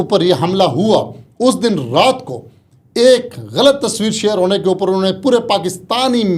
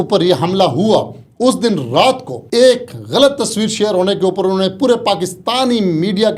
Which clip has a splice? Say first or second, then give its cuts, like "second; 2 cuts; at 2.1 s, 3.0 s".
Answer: second; 1 cut; at 2.3 s